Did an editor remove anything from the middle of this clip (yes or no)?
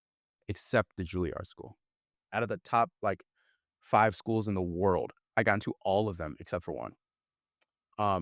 yes